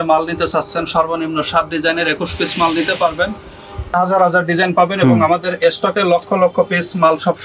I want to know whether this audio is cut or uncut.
cut